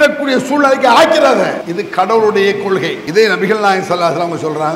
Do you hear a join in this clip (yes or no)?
yes